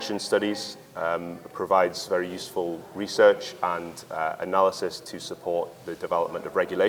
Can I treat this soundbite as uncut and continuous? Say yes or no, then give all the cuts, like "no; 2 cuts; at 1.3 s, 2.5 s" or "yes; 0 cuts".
yes; 0 cuts